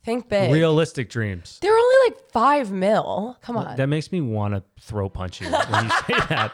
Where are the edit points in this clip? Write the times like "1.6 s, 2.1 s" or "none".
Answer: none